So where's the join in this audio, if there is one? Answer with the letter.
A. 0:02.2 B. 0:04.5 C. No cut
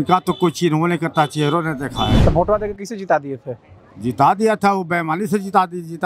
A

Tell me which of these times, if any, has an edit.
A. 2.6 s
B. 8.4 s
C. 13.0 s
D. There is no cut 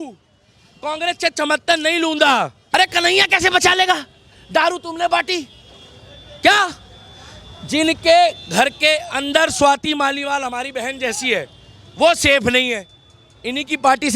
A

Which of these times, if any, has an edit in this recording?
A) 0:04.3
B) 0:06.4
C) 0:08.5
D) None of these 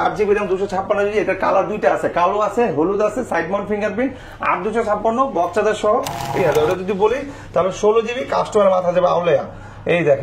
B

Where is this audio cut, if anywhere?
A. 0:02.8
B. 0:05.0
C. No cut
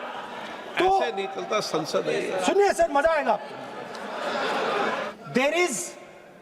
B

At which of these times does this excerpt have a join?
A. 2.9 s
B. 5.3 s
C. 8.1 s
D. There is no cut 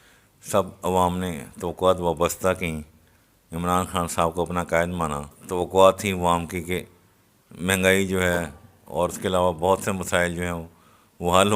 B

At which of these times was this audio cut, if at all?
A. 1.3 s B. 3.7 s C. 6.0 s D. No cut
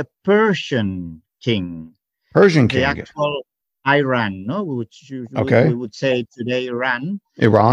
D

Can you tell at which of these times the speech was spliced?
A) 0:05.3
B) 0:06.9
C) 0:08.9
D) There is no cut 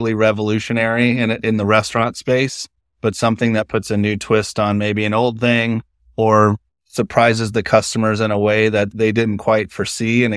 C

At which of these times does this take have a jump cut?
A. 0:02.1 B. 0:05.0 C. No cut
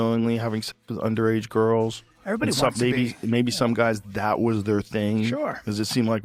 C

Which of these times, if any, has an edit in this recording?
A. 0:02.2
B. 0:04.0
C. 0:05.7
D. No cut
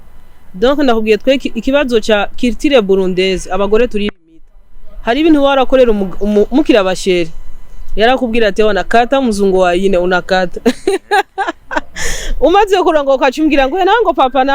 D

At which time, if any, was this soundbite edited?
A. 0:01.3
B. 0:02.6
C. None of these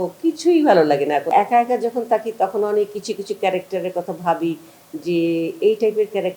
A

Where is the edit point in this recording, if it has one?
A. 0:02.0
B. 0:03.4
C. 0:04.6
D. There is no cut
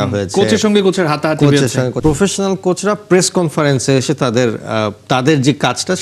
A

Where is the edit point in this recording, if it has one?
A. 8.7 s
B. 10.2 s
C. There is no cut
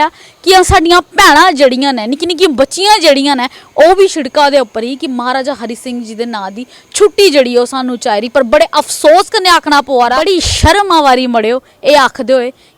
B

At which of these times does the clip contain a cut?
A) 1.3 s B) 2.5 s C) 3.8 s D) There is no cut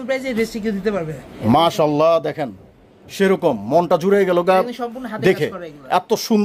A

